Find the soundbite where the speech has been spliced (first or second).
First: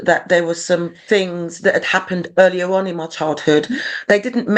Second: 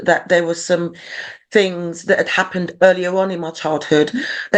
first